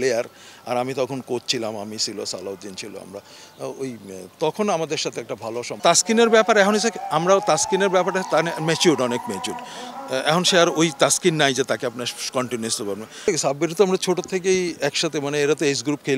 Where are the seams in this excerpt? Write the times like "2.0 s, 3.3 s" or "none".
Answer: 5.8 s, 13.3 s